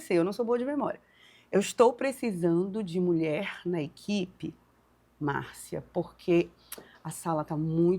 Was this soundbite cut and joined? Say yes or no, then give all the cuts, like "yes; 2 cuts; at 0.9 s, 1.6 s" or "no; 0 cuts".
no; 0 cuts